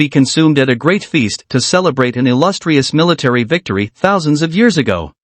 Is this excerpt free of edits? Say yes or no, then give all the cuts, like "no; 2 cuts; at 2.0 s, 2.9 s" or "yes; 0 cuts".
no; 1 cut; at 1.4 s